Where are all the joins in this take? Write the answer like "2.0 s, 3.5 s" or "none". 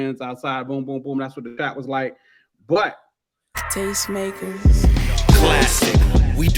3.6 s